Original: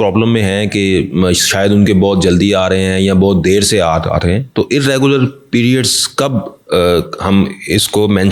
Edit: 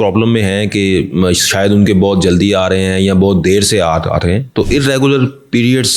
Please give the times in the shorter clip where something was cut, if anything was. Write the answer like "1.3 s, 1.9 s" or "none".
none

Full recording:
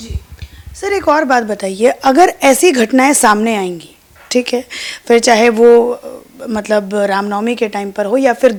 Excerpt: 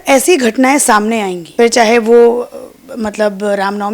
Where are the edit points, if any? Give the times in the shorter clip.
1.4 s

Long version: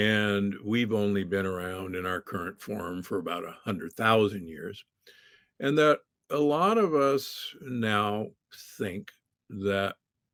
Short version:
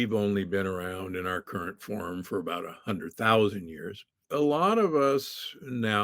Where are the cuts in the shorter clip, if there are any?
4.2 s

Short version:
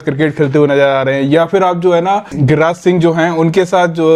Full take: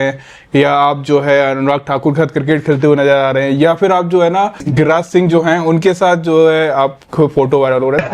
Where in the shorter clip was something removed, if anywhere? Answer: none

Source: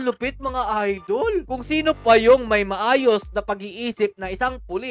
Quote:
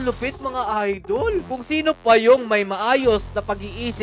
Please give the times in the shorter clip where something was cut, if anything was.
none

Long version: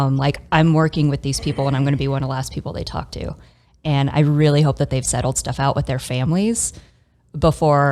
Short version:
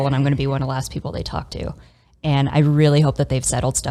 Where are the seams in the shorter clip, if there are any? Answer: none

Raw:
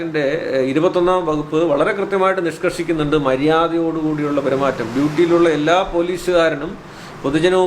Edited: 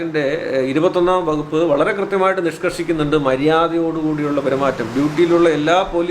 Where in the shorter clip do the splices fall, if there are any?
none

